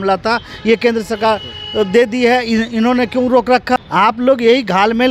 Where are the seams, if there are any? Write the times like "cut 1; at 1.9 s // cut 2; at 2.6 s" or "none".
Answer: cut 1; at 3.8 s